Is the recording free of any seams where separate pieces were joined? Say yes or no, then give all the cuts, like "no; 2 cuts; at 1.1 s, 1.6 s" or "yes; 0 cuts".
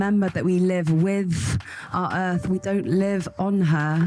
yes; 0 cuts